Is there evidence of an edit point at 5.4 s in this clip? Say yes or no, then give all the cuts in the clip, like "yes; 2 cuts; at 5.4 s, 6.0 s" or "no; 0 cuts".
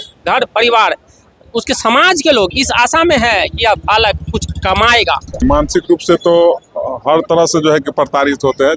yes; 1 cut; at 5.4 s